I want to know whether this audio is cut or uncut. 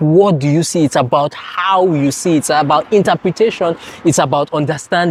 uncut